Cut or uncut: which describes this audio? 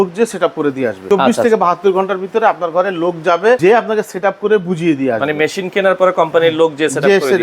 cut